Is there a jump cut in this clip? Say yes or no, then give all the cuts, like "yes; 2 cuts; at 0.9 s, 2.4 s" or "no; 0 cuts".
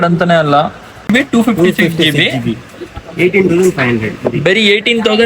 yes; 1 cut; at 1.1 s